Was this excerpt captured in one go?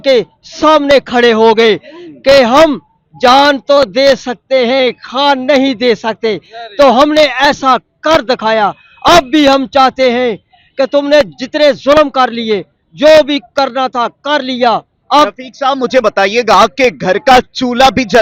yes; 0 cuts

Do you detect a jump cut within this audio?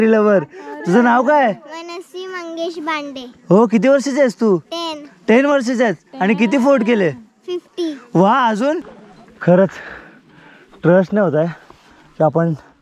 yes; 1 cut; at 8.8 s

